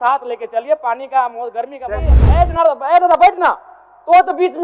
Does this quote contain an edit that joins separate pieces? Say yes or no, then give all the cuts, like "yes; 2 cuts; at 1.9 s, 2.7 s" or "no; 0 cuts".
yes; 1 cut; at 2.2 s